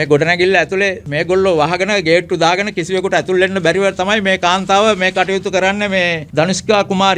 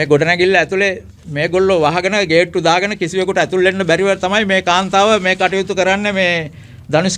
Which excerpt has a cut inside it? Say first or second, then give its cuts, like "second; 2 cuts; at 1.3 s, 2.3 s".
first; 2 cuts; at 1.1 s, 6.2 s